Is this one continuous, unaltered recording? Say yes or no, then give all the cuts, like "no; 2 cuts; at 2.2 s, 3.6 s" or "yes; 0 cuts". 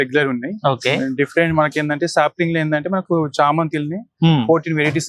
yes; 0 cuts